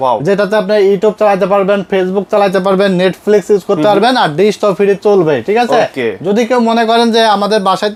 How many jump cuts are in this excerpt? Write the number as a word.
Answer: zero